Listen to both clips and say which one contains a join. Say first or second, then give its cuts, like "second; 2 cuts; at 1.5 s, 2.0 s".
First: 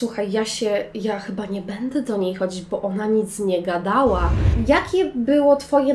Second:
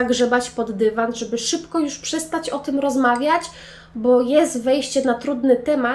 first; 1 cut; at 4.5 s